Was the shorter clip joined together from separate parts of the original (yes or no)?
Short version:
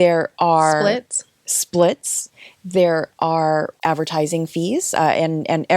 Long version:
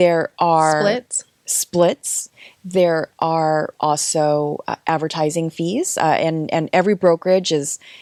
yes